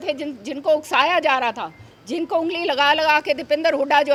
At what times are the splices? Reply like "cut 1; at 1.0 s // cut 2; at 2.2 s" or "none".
none